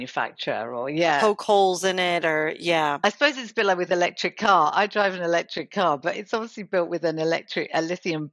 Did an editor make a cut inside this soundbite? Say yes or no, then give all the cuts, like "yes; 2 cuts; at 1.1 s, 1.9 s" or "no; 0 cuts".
no; 0 cuts